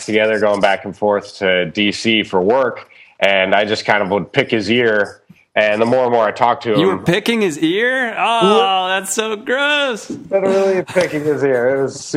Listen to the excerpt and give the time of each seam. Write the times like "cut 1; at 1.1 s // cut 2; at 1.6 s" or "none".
none